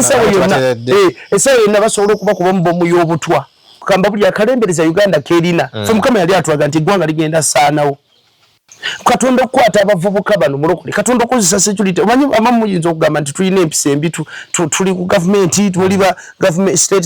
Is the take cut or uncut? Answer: cut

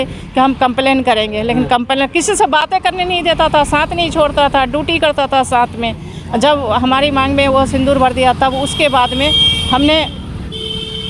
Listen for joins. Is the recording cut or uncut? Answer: uncut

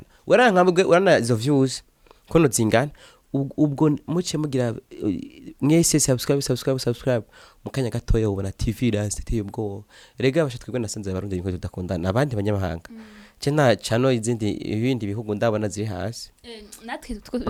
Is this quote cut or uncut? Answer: uncut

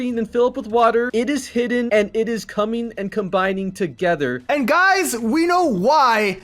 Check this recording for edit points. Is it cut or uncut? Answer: cut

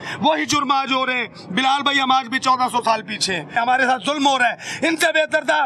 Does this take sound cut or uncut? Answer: uncut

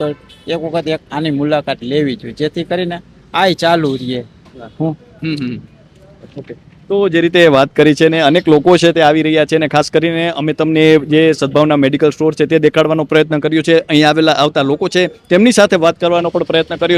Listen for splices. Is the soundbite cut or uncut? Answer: uncut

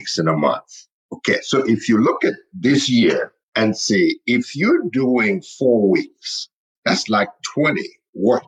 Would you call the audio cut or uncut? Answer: cut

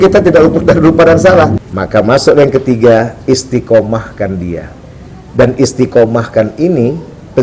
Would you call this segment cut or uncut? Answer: cut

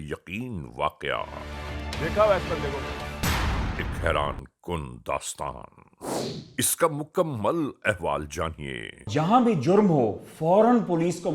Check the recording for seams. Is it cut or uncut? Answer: cut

